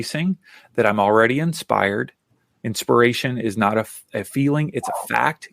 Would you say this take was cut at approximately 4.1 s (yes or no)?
yes